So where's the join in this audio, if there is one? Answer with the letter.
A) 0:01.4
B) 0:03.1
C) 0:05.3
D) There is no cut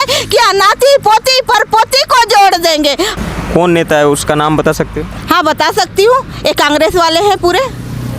B